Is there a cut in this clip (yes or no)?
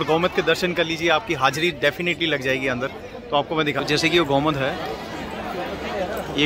no